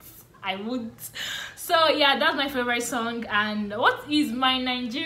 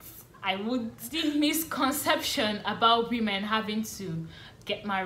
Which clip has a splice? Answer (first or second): second